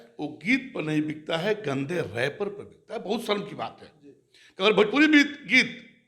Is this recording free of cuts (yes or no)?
yes